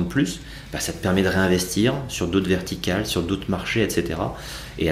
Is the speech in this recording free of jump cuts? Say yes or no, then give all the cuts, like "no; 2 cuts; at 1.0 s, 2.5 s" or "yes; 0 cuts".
yes; 0 cuts